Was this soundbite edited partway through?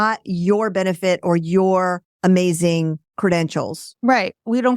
yes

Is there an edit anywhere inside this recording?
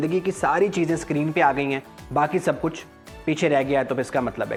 no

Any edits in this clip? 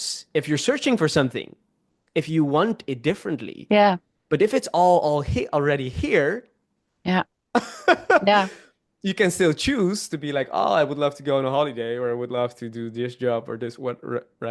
no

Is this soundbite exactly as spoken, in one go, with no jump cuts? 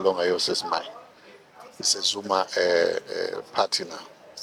yes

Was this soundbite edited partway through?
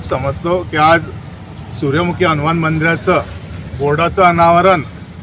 no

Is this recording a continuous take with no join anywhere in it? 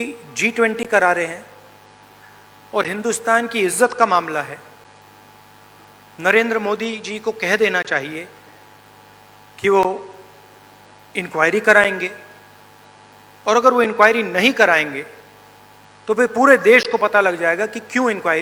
yes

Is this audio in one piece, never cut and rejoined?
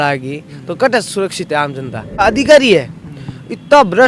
no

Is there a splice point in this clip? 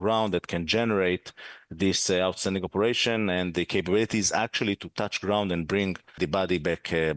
yes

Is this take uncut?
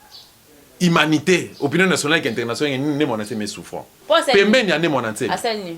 no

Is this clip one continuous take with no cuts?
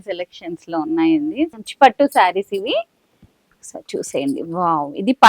no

